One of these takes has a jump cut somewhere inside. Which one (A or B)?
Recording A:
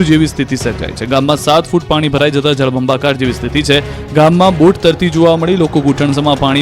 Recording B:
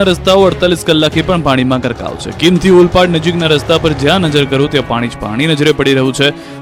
A